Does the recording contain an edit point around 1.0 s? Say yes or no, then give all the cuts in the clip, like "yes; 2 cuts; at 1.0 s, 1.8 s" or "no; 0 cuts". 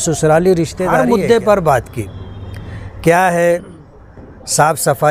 yes; 1 cut; at 1.0 s